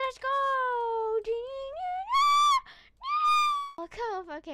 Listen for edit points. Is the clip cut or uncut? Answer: cut